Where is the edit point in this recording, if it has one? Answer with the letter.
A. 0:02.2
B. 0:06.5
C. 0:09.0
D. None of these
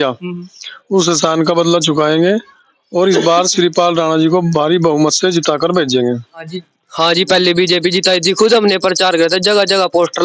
B